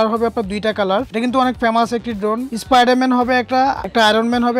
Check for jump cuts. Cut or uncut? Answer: cut